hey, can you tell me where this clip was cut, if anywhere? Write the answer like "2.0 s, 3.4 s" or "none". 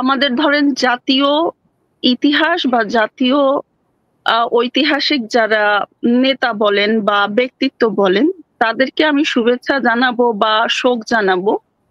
none